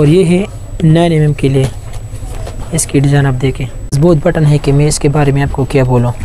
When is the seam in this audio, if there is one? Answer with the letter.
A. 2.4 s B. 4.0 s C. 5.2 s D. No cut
B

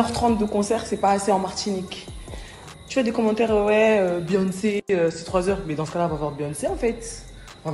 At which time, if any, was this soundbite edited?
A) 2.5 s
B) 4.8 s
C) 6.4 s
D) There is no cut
D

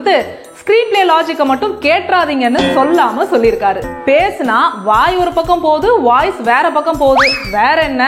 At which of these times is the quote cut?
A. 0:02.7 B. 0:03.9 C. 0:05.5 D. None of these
B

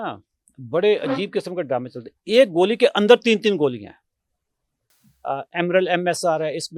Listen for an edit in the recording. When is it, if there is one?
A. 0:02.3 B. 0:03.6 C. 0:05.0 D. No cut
C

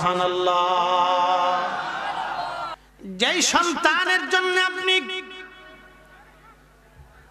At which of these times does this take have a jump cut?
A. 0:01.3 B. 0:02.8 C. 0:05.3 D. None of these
B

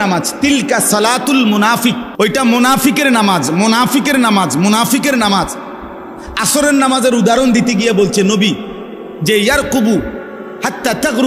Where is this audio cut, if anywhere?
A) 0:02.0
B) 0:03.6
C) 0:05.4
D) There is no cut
A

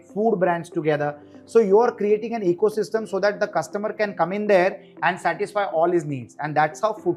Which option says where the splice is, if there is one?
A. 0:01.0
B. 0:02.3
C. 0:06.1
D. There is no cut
D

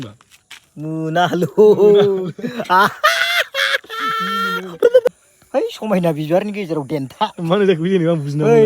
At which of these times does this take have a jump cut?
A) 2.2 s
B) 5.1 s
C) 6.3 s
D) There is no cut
B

